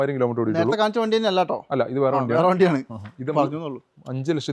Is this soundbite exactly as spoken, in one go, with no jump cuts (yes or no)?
yes